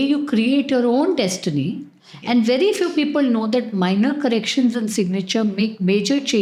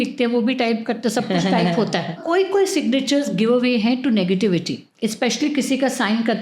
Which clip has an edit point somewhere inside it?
second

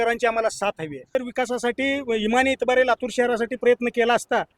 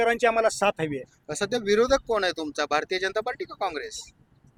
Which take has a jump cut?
first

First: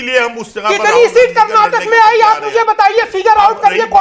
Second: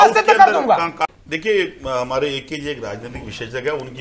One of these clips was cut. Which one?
second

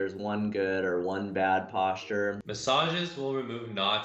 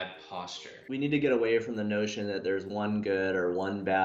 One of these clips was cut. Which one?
first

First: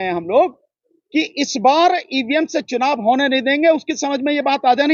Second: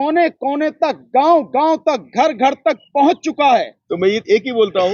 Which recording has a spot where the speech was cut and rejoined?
second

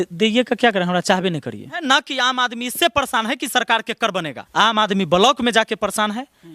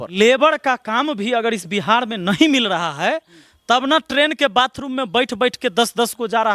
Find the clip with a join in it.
first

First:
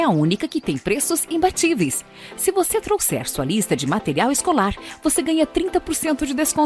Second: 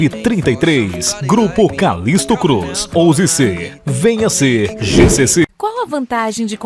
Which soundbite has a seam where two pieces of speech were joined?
second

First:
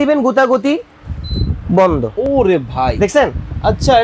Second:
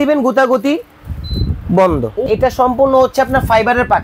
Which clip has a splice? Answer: second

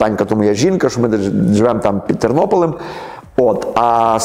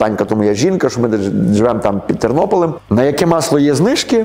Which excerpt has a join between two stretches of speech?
second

